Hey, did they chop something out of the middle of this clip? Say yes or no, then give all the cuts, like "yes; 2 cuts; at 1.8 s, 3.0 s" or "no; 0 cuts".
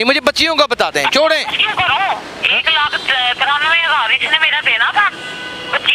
no; 0 cuts